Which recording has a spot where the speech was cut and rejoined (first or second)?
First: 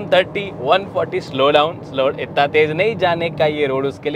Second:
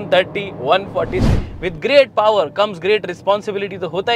second